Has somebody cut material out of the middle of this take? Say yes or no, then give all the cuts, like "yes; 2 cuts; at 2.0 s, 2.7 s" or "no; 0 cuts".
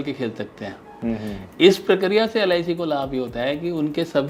no; 0 cuts